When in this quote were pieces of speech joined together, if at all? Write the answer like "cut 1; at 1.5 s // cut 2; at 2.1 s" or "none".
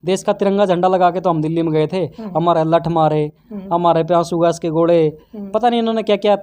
none